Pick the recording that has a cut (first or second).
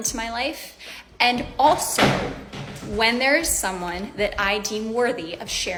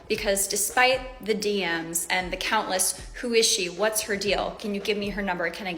second